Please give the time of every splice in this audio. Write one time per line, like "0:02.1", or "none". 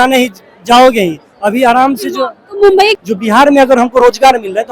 0:03.0